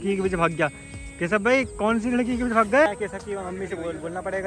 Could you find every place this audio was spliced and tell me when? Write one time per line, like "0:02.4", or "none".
0:02.9